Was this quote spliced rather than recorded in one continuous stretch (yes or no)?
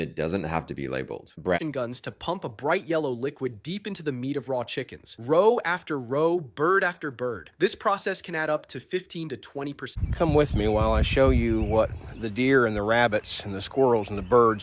yes